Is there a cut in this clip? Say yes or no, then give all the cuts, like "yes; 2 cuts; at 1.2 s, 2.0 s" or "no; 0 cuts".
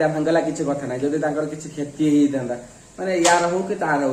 no; 0 cuts